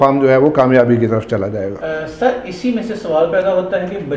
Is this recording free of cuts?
yes; 0 cuts

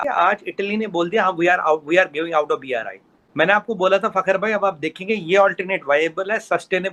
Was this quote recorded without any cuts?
yes; 0 cuts

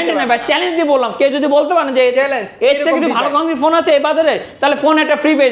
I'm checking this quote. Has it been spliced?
no; 0 cuts

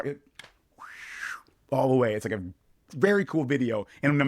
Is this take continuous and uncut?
yes; 0 cuts

